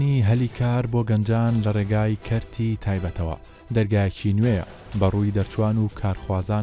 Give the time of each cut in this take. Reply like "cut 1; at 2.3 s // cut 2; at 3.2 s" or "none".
none